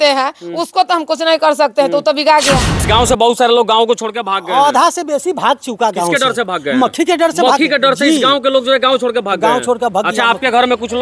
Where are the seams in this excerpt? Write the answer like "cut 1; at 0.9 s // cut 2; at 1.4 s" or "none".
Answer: cut 1; at 2.8 s